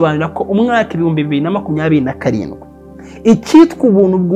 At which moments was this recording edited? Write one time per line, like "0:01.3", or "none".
none

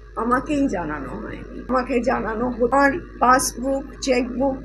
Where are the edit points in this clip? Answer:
0:01.6
0:02.7

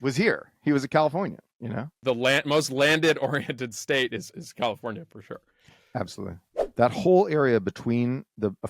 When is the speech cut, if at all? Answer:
0:01.9
0:06.5

